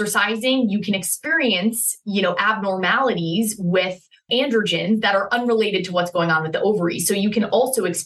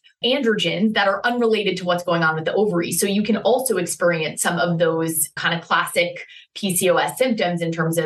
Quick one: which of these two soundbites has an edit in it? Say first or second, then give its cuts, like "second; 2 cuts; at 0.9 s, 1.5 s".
second; 1 cut; at 5.4 s